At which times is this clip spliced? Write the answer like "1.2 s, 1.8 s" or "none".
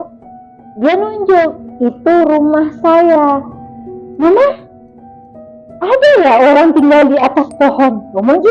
none